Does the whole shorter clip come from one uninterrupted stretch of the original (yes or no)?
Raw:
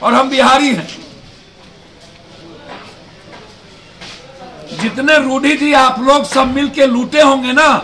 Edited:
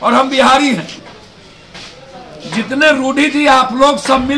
no